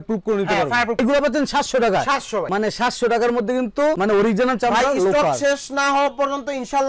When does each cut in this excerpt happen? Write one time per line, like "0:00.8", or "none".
0:01.0